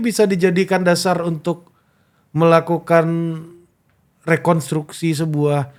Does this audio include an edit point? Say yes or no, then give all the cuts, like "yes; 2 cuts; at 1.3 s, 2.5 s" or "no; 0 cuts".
no; 0 cuts